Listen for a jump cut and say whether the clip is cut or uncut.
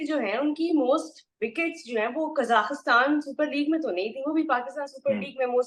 uncut